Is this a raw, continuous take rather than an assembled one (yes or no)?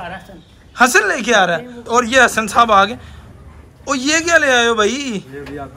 no